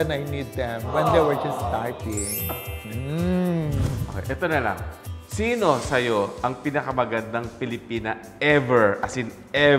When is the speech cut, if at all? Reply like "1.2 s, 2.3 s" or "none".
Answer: 3.8 s

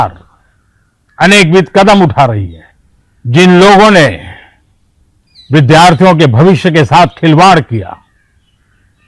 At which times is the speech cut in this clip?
6.6 s

